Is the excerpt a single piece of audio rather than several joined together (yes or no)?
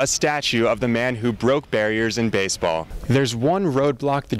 no